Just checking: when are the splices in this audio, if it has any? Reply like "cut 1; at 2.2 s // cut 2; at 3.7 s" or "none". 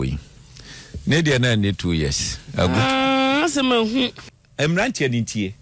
cut 1; at 4.2 s

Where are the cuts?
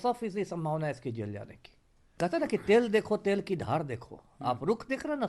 cut 1; at 2.1 s

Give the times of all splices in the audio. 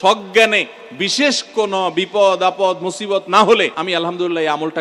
cut 1; at 3.8 s

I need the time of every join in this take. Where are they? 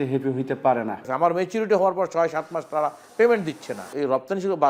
cut 1; at 1.1 s // cut 2; at 3.9 s

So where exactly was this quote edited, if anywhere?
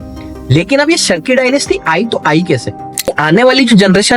cut 1; at 3.1 s

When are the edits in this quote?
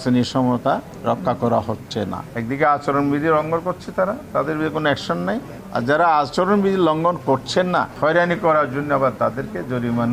cut 1; at 0.9 s // cut 2; at 2.2 s // cut 3; at 5.6 s // cut 4; at 7.9 s

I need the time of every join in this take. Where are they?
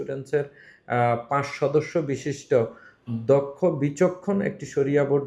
none

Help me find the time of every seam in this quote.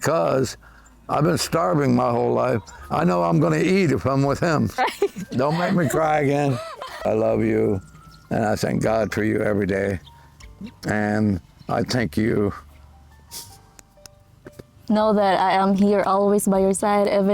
cut 1; at 4.8 s // cut 2; at 7.1 s // cut 3; at 14.9 s

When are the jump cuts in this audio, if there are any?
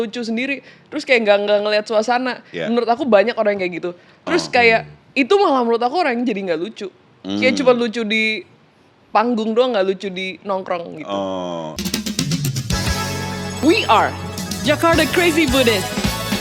cut 1; at 11.7 s

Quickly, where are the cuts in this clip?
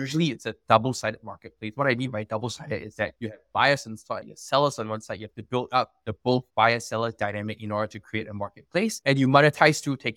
none

